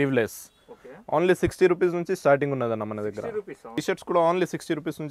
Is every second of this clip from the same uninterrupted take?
no; 1 cut; at 3.8 s

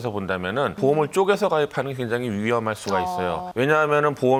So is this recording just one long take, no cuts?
yes; 0 cuts

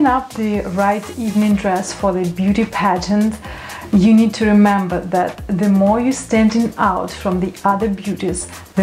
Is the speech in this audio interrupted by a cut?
no; 0 cuts

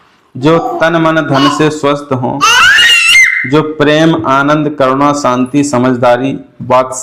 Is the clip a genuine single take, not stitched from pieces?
yes; 0 cuts

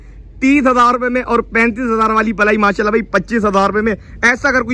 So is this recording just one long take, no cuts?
yes; 0 cuts

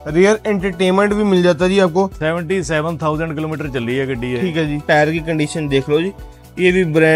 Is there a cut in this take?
yes; 2 cuts; at 2.2 s, 4.8 s

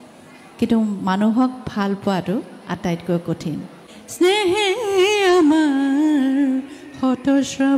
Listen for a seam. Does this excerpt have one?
yes; 1 cut; at 4.0 s

